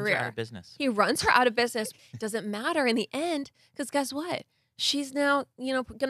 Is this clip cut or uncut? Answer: cut